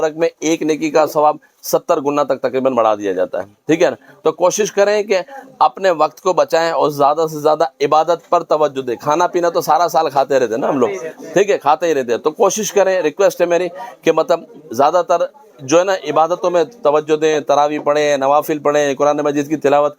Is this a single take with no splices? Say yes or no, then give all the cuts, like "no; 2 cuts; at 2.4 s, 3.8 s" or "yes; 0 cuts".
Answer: yes; 0 cuts